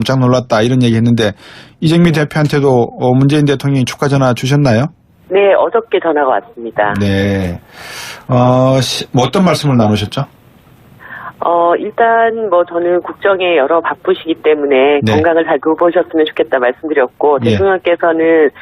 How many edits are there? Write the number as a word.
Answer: one